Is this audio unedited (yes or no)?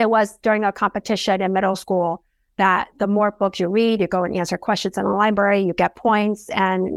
yes